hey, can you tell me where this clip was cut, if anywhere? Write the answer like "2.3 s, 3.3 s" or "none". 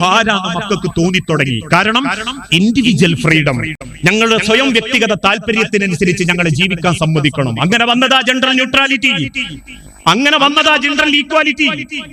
none